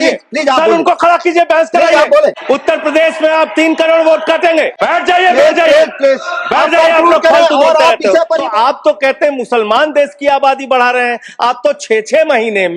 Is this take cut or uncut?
cut